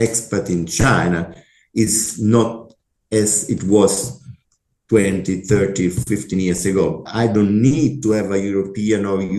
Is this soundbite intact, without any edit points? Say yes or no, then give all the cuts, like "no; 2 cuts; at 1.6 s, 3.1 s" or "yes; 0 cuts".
no; 1 cut; at 7.0 s